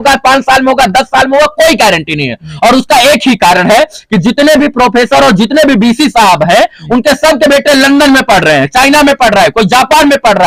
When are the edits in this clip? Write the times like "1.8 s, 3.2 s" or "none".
none